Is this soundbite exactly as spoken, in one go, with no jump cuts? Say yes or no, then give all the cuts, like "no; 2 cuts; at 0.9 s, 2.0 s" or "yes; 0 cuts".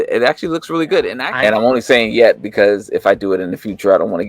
no; 1 cut; at 1.2 s